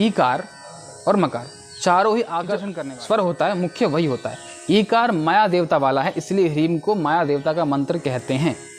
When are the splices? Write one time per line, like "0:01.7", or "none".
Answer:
0:02.7